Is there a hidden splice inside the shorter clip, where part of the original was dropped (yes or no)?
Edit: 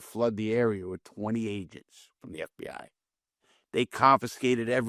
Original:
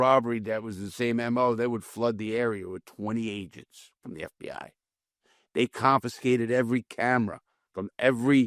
no